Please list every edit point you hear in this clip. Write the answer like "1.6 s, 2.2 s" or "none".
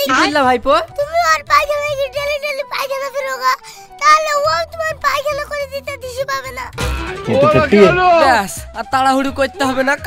0.9 s, 6.8 s